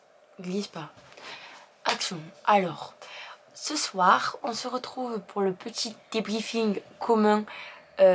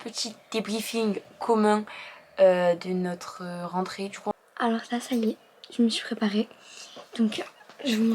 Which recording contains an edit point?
second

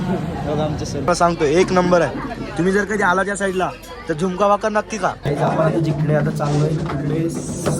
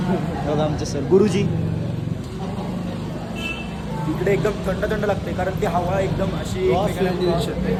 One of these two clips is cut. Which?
first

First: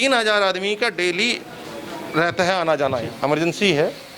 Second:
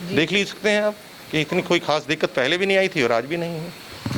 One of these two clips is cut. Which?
first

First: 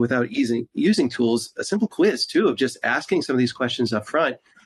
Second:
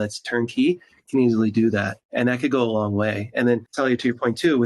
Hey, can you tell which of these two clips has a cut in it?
second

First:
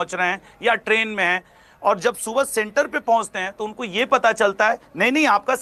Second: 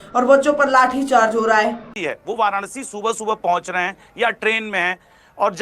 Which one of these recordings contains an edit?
second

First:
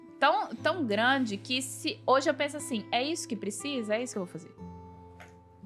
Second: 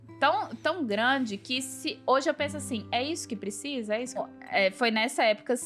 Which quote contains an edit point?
second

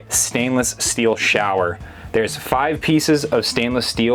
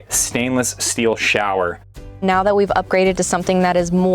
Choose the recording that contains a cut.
second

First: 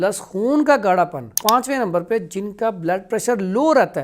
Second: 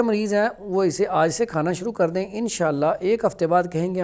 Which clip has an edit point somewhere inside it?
first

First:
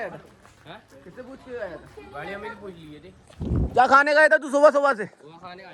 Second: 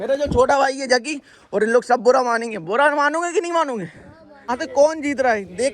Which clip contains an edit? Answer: second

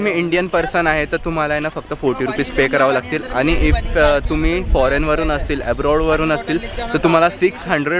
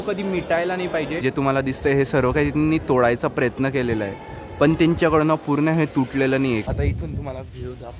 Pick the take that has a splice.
second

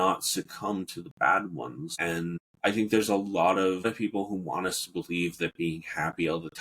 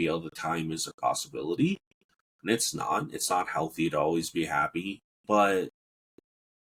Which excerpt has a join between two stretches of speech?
first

